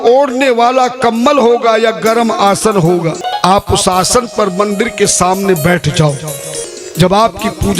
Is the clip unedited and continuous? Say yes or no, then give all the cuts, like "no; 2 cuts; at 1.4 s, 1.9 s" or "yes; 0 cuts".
no; 2 cuts; at 3.2 s, 6.7 s